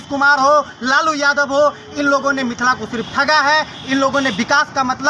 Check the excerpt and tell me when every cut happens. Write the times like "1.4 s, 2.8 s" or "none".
none